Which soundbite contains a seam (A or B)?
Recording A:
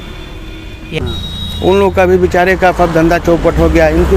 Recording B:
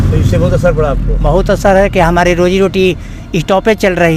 A